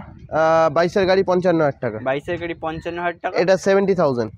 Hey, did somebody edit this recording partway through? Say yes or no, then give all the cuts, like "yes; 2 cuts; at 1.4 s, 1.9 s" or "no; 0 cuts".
no; 0 cuts